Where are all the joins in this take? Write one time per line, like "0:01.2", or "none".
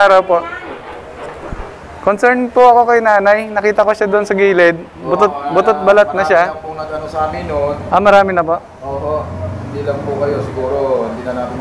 none